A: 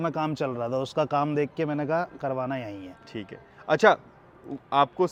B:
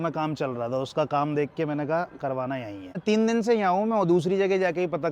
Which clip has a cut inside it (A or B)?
B